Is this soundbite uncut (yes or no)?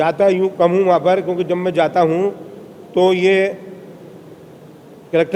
yes